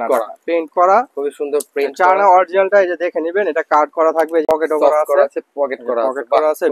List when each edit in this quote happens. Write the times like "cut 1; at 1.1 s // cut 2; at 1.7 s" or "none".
cut 1; at 4.4 s